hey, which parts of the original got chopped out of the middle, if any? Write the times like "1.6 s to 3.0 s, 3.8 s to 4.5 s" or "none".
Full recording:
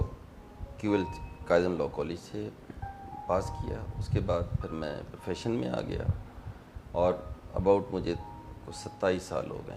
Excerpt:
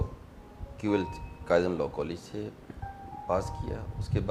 none